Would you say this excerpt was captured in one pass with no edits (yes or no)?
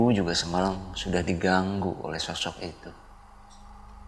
yes